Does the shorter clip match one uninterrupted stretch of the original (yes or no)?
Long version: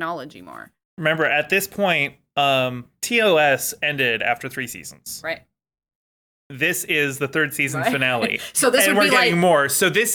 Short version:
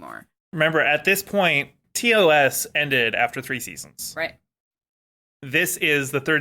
no